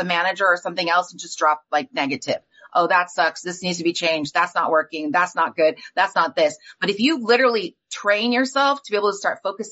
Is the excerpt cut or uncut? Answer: uncut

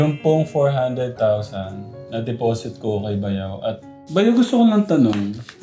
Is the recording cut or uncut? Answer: cut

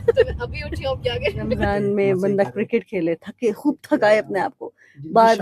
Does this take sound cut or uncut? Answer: cut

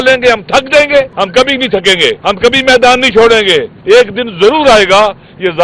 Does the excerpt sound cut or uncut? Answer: cut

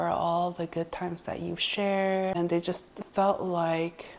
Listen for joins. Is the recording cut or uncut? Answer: cut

